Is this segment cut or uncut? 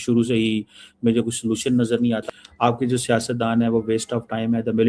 cut